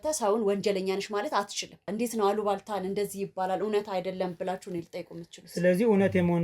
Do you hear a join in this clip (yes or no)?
yes